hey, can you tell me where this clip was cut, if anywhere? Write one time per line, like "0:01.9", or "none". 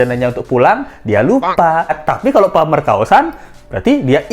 0:01.9